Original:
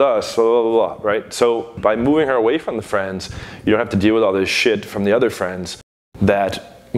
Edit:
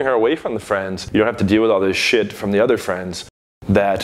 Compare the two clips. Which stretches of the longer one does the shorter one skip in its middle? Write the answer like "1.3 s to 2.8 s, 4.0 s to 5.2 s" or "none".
3.2 s to 3.5 s